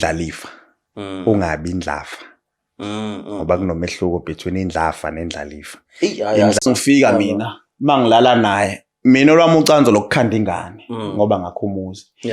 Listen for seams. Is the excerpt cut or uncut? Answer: cut